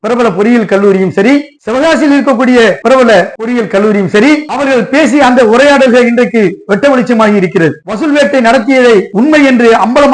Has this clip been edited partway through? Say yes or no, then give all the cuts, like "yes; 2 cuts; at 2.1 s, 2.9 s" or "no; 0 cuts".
yes; 4 cuts; at 3.1 s, 4.5 s, 7.9 s, 9.1 s